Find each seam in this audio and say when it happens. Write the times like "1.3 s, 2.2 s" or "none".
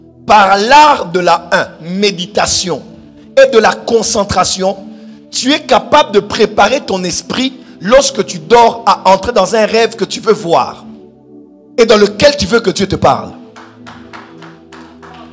none

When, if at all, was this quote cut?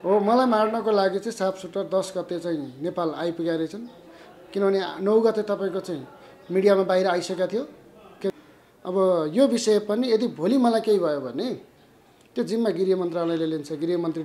8.4 s

